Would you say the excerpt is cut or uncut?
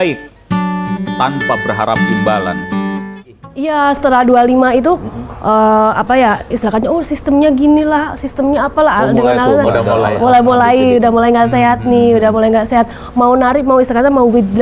cut